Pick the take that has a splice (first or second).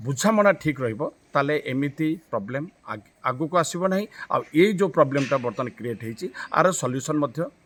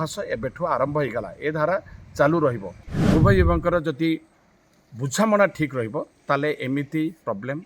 second